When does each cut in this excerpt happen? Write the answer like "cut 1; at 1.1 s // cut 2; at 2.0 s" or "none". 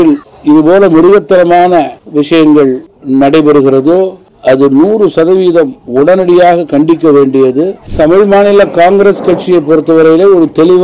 cut 1; at 7.8 s